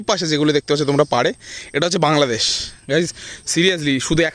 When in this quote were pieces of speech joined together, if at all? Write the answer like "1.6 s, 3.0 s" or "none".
none